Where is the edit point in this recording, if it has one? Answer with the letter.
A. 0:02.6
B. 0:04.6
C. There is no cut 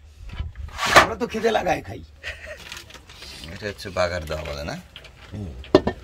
A